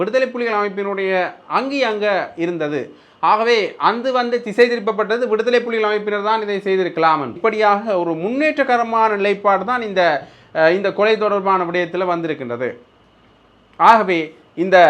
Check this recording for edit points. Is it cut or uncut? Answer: cut